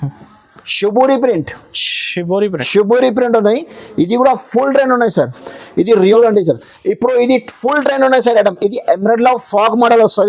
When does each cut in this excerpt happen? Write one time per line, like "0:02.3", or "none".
0:06.1